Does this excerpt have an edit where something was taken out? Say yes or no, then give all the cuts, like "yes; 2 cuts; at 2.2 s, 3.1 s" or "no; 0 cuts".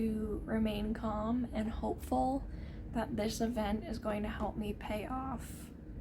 no; 0 cuts